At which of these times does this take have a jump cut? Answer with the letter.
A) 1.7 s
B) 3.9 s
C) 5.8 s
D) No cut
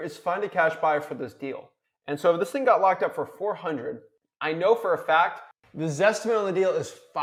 D